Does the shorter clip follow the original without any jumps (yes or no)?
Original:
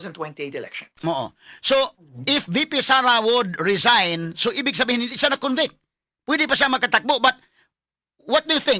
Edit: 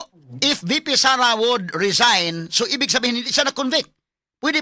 yes